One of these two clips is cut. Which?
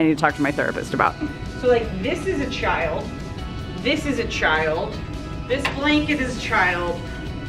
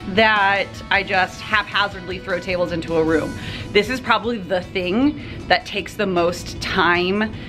first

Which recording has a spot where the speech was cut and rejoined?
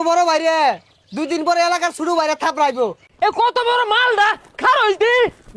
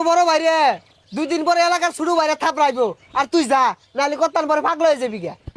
first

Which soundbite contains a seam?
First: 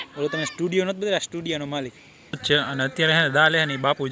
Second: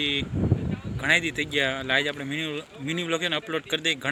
first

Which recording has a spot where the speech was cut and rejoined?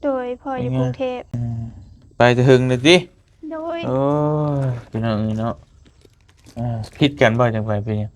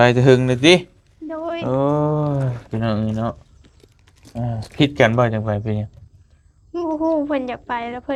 first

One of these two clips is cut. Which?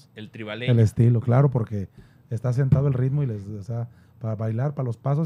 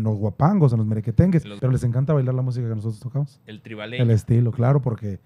second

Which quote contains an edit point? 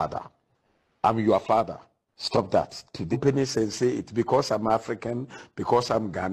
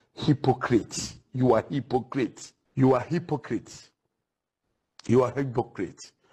first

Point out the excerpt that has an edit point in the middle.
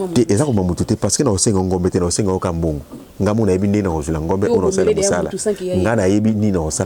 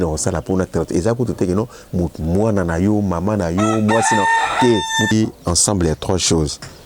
second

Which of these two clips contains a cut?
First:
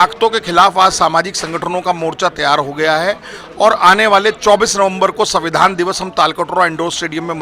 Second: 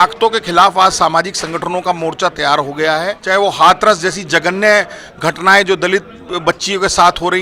second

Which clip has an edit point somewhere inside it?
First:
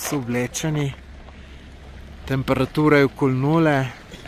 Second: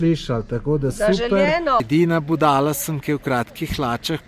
second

